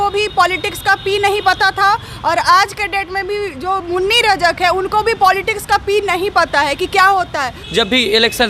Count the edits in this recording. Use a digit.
1